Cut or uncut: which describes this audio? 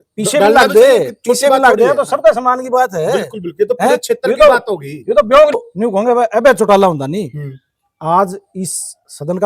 cut